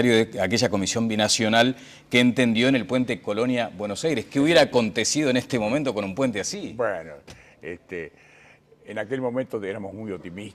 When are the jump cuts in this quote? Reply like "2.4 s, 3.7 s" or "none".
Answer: 8.7 s

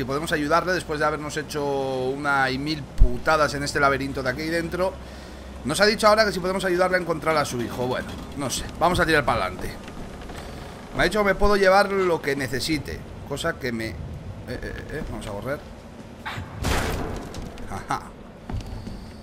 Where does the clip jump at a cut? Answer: none

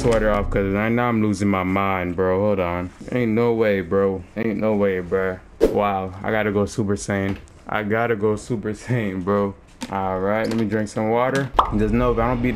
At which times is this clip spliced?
2.9 s, 4.3 s, 5.5 s, 7.5 s, 9.7 s, 11.6 s

